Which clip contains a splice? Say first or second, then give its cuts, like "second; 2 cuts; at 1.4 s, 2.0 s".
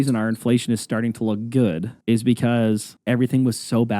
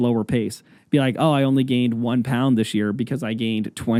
first; 2 cuts; at 1.9 s, 2.9 s